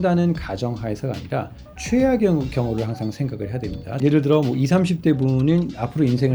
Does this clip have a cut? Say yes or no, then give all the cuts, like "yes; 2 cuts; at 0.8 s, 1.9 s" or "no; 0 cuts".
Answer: yes; 1 cut; at 3.9 s